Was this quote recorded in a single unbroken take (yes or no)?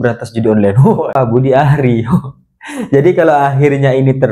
no